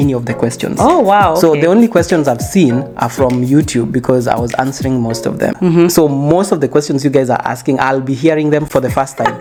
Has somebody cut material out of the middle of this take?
no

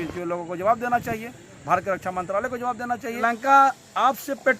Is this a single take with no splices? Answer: no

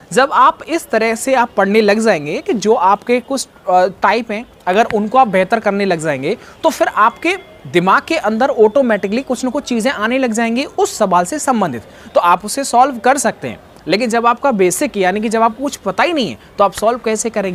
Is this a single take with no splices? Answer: yes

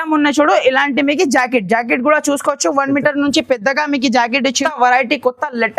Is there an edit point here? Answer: yes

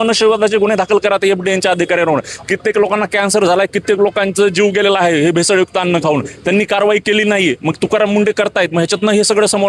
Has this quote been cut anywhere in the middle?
no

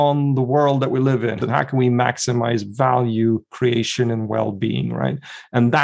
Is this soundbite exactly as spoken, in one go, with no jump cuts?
no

